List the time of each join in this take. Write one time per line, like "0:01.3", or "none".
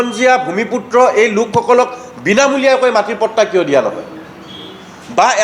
none